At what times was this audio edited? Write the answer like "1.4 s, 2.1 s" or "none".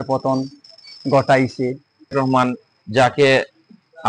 2.1 s